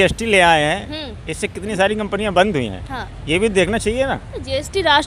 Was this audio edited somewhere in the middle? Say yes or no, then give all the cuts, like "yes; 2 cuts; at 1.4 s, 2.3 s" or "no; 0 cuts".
no; 0 cuts